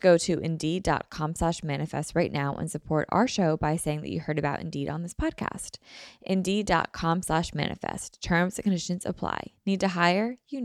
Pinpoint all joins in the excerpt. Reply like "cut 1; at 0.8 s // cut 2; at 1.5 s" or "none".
none